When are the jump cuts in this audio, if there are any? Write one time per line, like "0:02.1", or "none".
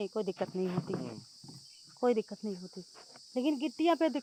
none